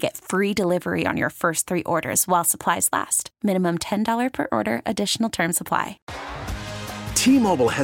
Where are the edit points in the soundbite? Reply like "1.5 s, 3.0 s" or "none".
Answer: 6.1 s